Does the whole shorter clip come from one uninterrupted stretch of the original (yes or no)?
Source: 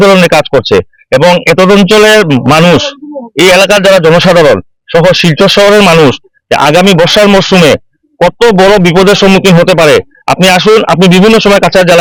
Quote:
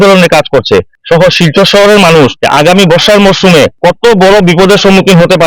no